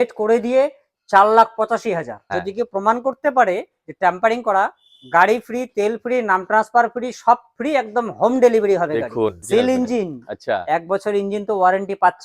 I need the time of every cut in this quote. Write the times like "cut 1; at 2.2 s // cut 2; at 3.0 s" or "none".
cut 1; at 2.3 s // cut 2; at 9.4 s

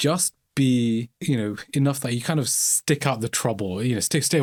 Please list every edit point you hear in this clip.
none

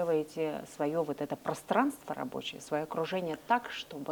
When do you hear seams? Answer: none

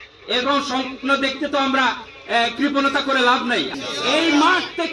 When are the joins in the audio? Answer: cut 1; at 3.7 s

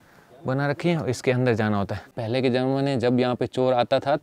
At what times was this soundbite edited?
cut 1; at 2.1 s

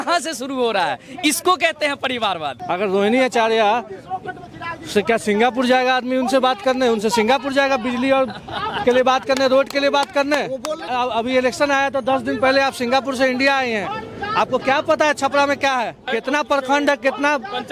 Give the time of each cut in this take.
cut 1; at 2.5 s // cut 2; at 10.8 s // cut 3; at 16.0 s

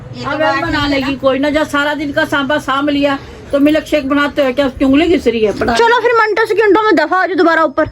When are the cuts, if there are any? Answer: cut 1; at 5.6 s

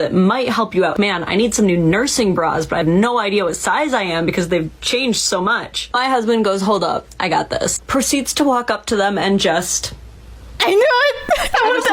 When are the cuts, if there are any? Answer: cut 1; at 0.9 s

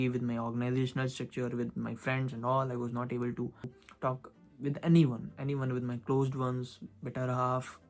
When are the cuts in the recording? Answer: cut 1; at 3.8 s

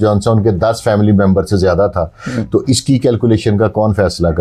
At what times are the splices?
none

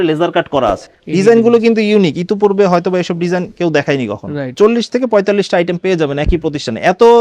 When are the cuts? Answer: cut 1; at 0.9 s // cut 2; at 4.6 s

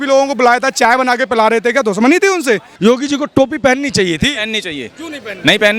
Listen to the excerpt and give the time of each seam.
cut 1; at 2.7 s

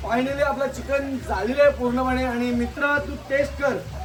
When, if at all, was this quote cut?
none

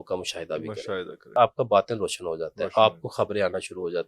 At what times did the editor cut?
cut 1; at 1.4 s

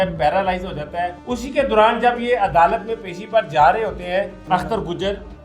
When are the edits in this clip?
cut 1; at 1.2 s // cut 2; at 4.4 s

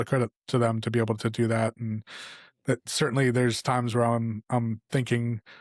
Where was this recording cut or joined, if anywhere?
none

